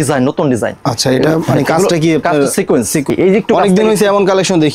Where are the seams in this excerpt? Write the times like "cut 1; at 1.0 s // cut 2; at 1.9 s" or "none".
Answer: cut 1; at 3.1 s